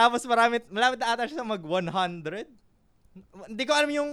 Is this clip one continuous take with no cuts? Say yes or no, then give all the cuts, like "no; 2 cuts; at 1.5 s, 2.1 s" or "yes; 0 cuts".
yes; 0 cuts